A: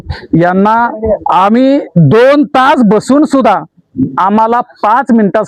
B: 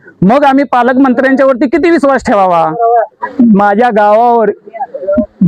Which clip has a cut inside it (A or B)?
B